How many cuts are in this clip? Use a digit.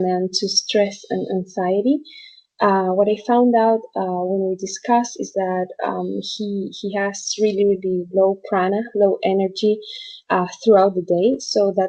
1